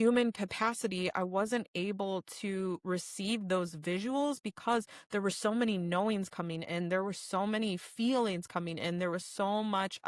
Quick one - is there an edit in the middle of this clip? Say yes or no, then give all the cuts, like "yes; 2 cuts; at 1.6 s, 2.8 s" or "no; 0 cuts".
no; 0 cuts